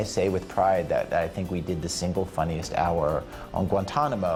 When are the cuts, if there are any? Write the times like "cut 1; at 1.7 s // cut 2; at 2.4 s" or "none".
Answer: none